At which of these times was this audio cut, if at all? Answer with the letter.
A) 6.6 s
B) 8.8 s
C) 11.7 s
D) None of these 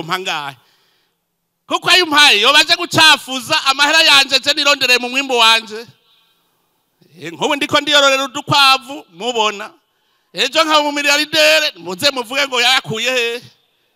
D